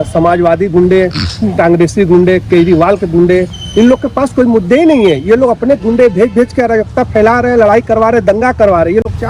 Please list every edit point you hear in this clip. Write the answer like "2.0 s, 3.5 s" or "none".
none